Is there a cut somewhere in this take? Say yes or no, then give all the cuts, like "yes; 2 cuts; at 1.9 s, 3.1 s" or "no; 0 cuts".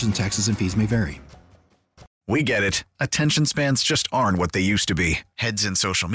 yes; 1 cut; at 2.1 s